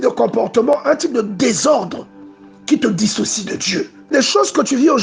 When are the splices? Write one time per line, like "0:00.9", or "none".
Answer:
0:04.1